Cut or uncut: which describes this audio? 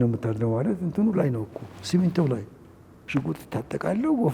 cut